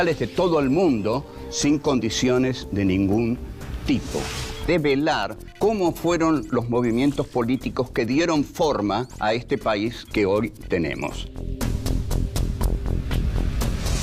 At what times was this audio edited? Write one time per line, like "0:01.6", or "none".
0:06.5